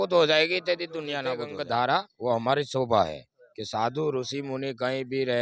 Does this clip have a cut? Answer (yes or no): yes